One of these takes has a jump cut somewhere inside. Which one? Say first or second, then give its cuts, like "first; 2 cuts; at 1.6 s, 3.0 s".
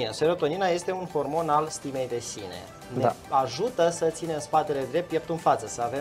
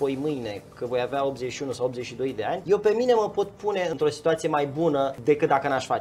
second; 3 cuts; at 2.6 s, 3.9 s, 5.2 s